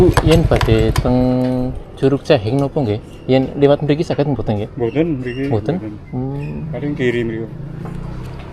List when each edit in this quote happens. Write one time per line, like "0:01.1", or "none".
none